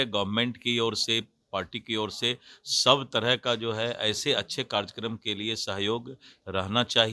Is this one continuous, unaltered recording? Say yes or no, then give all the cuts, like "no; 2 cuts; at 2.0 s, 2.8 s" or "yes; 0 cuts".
yes; 0 cuts